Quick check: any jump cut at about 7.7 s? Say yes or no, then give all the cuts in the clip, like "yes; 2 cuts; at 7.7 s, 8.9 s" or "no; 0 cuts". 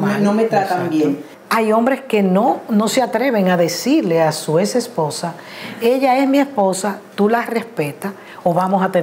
no; 1 cut; at 1.3 s